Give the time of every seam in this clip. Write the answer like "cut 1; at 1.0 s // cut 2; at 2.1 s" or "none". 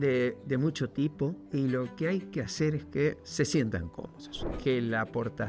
cut 1; at 1.4 s // cut 2; at 3.2 s // cut 3; at 4.5 s